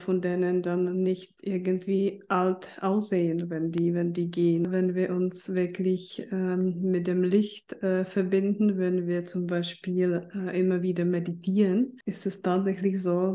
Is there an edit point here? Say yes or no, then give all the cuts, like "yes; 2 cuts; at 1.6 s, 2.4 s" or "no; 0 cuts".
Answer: yes; 2 cuts; at 4.7 s, 12.1 s